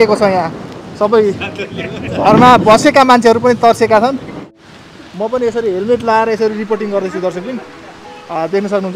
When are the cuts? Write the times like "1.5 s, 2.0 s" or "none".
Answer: 4.4 s